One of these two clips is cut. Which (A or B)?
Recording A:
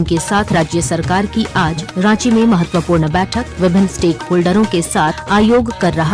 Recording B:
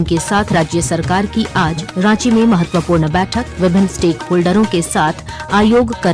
A